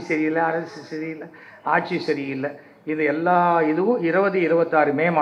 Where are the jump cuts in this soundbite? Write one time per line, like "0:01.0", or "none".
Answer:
none